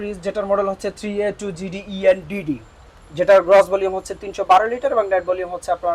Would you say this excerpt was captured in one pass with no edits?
yes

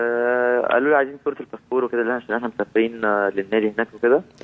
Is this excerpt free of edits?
yes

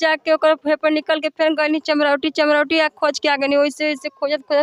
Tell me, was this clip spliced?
no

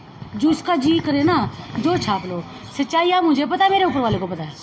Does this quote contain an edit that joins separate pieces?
no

